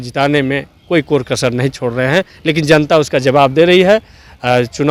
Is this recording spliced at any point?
no; 0 cuts

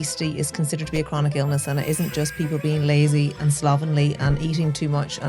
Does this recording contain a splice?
no; 0 cuts

